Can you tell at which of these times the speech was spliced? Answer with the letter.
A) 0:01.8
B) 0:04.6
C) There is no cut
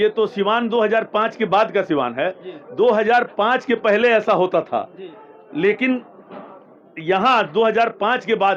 C